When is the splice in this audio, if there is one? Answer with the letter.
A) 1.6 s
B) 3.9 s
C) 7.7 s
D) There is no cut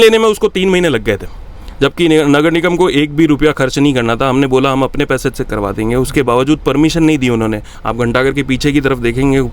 C